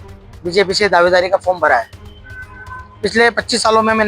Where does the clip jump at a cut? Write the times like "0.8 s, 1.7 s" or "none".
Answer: none